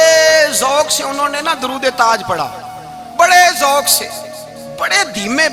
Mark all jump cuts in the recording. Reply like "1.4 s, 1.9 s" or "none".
none